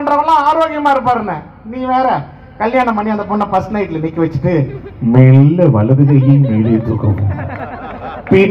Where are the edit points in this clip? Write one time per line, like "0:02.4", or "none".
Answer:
none

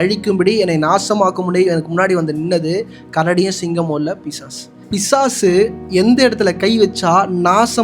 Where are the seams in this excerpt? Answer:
0:04.8
0:05.8

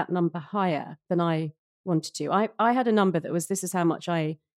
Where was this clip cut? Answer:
none

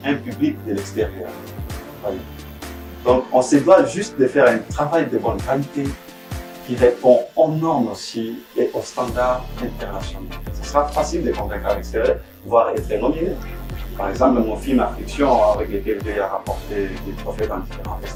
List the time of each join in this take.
none

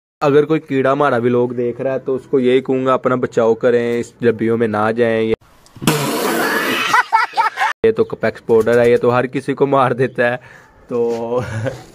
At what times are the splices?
none

